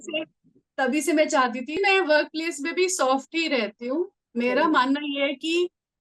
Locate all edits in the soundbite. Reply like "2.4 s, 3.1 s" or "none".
1.8 s